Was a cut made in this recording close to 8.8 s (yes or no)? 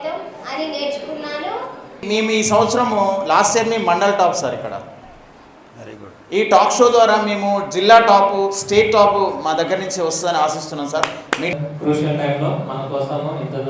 no